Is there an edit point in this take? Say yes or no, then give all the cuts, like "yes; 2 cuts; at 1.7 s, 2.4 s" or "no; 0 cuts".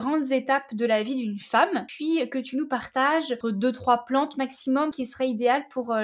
yes; 3 cuts; at 1.9 s, 3.4 s, 4.9 s